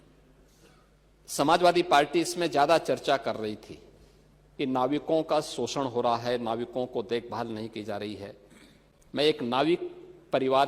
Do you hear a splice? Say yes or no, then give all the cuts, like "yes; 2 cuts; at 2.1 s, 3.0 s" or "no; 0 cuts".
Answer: no; 0 cuts